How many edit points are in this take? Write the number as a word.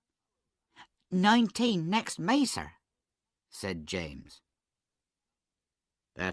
one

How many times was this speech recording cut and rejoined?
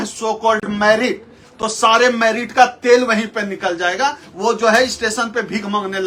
zero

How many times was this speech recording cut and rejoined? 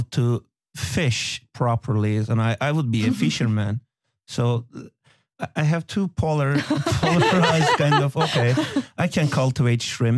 zero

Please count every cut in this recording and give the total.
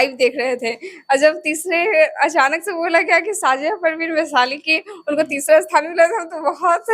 zero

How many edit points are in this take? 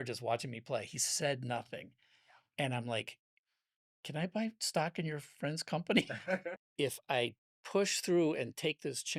one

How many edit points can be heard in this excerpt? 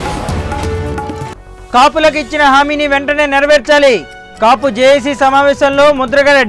one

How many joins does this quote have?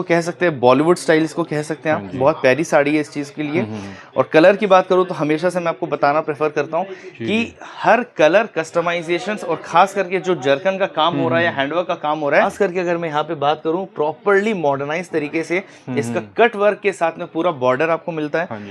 one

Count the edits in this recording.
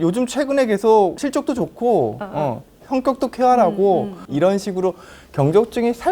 two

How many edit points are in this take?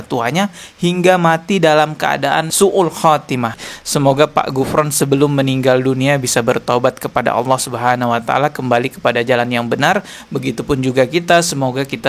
one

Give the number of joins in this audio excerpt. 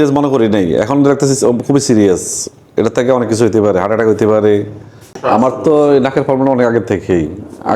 one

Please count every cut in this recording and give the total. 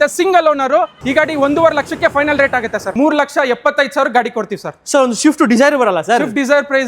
two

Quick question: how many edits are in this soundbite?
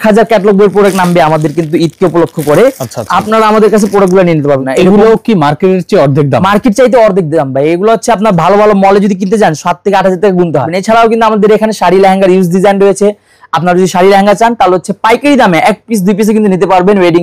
two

